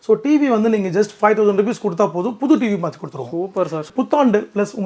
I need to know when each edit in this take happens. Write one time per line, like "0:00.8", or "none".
0:03.9